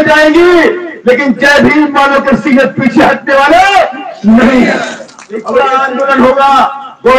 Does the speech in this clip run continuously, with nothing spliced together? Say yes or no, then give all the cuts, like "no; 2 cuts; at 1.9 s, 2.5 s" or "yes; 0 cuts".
no; 1 cut; at 5.5 s